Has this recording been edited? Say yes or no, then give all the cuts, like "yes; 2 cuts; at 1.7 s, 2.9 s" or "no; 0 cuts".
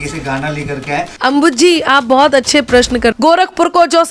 yes; 2 cuts; at 1.1 s, 3.1 s